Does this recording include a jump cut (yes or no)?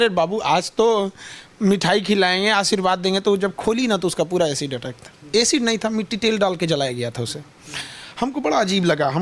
no